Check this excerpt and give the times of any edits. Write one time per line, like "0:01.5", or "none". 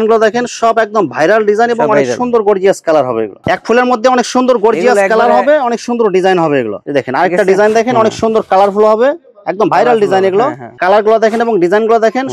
0:03.4
0:06.8
0:10.7